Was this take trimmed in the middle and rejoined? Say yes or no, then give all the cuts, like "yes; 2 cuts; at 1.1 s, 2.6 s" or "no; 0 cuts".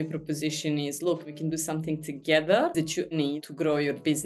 yes; 2 cuts; at 1.4 s, 3.1 s